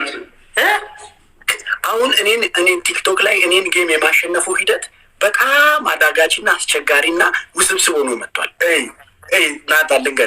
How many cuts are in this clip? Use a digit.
1